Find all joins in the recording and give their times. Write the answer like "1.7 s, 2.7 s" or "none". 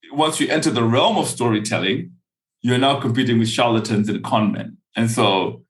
none